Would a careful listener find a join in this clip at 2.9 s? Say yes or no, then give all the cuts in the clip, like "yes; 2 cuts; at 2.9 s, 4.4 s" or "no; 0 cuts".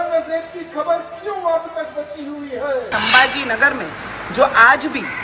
yes; 1 cut; at 2.9 s